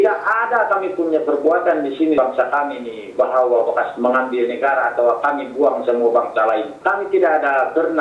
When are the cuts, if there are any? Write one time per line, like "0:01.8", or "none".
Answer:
0:02.2
0:06.8